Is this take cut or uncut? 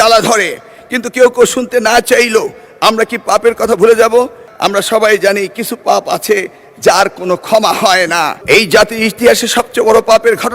cut